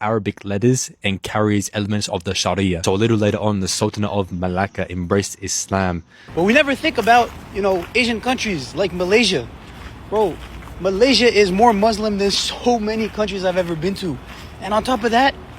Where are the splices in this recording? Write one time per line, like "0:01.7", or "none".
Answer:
0:06.2